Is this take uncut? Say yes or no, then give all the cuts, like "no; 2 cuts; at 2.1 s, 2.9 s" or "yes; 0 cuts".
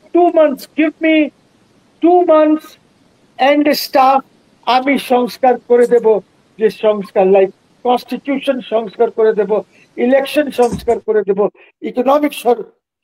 yes; 0 cuts